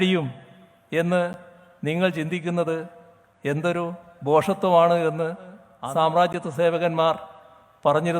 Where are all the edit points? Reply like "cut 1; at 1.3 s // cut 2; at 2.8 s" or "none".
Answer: cut 1; at 5.7 s